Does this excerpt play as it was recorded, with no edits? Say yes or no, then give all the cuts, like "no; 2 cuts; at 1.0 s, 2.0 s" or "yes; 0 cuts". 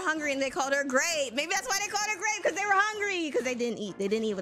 yes; 0 cuts